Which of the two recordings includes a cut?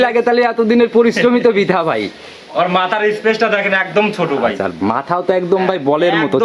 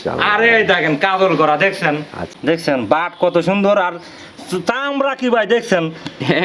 second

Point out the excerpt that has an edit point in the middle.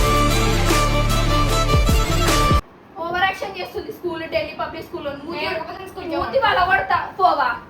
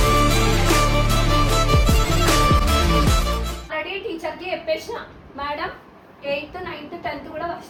first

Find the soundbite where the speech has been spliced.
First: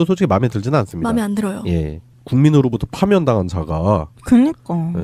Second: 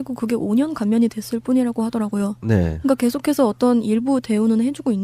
second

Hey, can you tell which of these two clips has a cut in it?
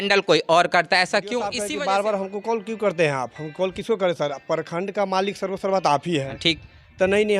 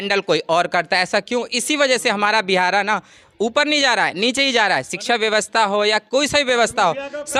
first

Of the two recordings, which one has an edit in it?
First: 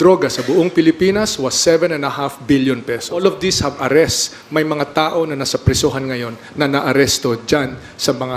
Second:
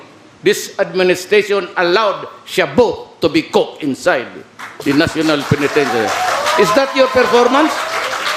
first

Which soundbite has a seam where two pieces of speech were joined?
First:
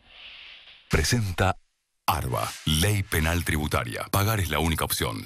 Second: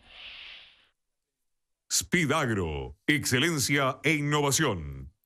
first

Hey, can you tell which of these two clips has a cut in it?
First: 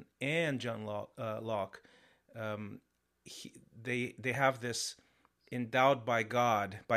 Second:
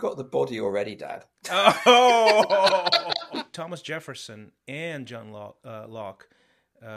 second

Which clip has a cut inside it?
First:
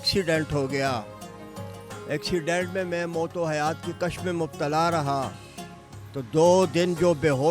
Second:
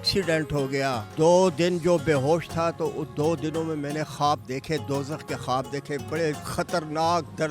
second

